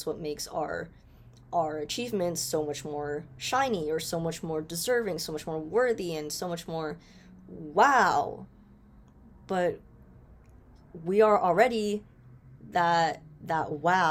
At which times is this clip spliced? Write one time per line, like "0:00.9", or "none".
none